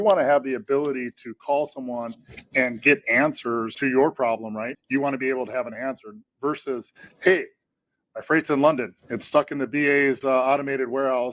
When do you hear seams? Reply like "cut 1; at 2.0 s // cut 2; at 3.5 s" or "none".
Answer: cut 1; at 3.8 s // cut 2; at 4.8 s